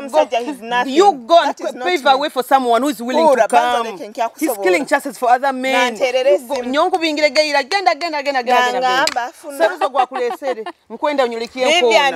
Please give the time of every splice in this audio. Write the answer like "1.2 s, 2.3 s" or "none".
none

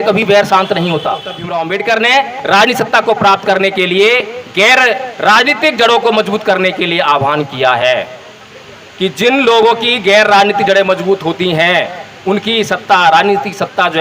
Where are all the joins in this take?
1.4 s

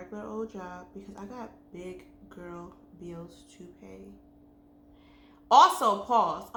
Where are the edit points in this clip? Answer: none

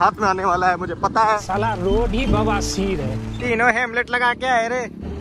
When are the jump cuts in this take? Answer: 1.4 s, 3.3 s

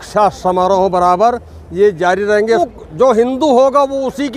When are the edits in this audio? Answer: 2.7 s

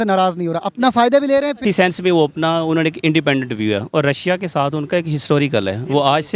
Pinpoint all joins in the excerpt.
1.6 s

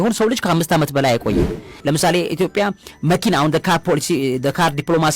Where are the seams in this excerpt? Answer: 1.6 s

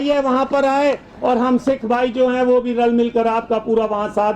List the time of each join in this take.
none

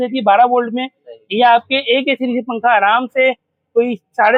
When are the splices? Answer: none

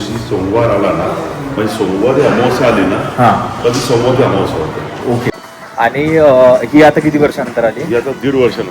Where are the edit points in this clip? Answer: 5.4 s

